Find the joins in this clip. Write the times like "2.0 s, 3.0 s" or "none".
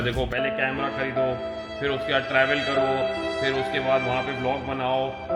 none